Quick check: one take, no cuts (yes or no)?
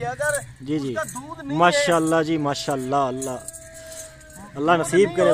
yes